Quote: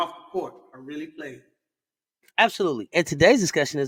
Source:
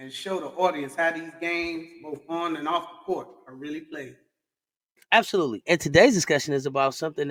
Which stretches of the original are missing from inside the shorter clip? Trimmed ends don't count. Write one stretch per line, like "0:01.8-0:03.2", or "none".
none